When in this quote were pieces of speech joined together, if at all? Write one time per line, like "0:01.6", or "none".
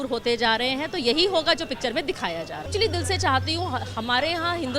0:02.7